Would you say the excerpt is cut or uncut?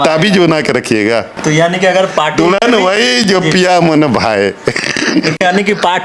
cut